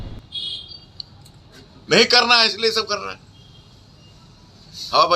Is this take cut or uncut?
uncut